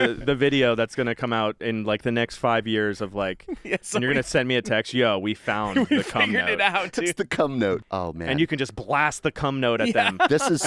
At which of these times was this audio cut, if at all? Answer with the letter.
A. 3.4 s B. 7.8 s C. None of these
B